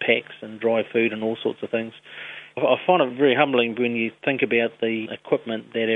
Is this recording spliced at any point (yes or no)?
yes